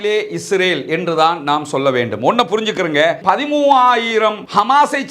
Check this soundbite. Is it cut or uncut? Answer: cut